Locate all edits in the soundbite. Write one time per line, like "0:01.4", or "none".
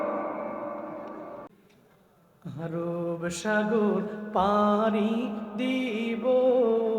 0:01.5

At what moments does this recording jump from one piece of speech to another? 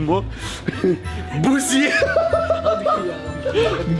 none

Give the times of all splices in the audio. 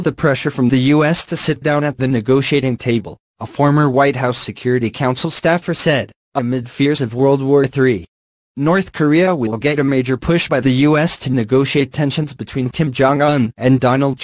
0:01.4
0:02.8
0:08.8

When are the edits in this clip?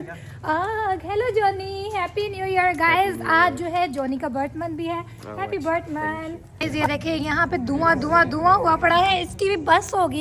0:06.7

